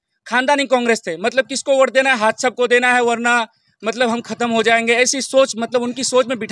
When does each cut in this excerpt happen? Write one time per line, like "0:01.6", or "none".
none